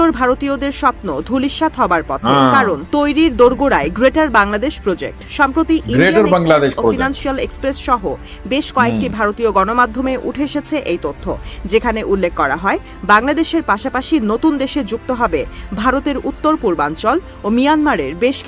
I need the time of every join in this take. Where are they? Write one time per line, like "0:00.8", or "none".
none